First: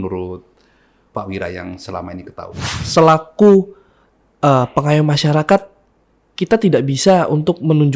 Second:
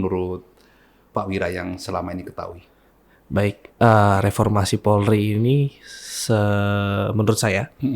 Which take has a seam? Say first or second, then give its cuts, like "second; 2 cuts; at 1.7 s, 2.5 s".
first; 1 cut; at 2.7 s